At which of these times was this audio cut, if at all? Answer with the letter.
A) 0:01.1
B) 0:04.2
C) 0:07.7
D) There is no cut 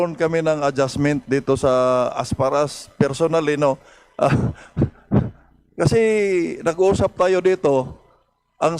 D